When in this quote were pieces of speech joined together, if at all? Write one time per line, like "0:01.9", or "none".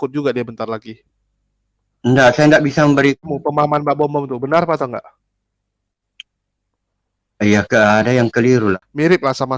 0:03.2
0:08.7